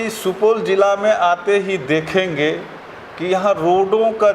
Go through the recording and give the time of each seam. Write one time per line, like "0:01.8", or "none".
none